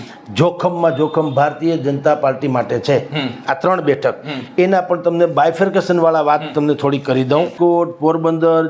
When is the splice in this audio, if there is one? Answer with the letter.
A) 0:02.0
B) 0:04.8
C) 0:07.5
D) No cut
C